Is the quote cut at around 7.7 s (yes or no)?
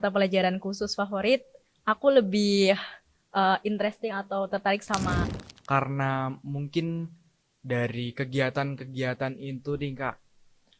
no